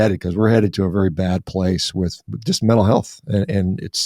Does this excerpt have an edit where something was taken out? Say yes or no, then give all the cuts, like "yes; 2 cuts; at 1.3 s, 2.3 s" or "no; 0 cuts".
no; 0 cuts